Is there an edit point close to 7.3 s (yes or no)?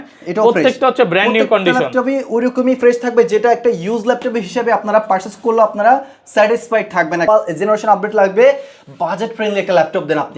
yes